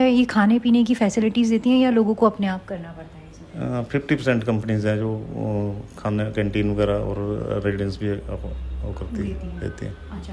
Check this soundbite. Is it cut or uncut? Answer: uncut